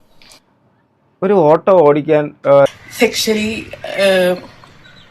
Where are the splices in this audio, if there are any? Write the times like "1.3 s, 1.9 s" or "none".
2.7 s

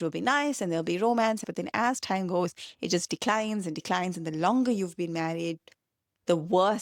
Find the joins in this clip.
1.4 s

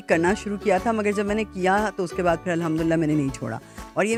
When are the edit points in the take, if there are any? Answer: none

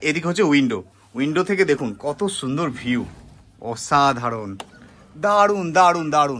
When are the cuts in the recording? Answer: none

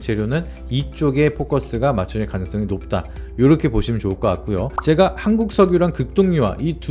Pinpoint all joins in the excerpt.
4.8 s

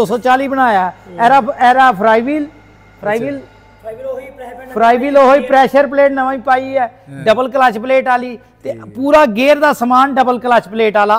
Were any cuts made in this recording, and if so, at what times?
none

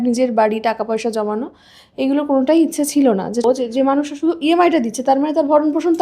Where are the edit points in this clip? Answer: 3.4 s

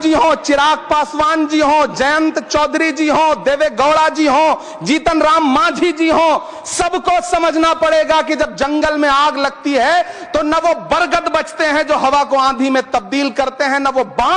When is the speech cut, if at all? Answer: none

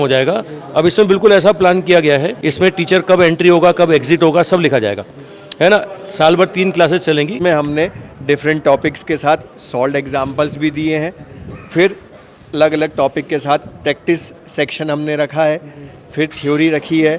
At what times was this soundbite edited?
2.4 s, 7.3 s

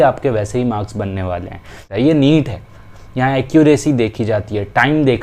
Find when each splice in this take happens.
1.8 s

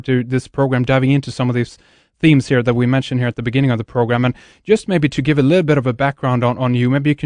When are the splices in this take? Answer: none

